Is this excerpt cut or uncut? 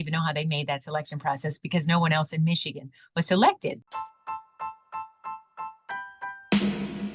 cut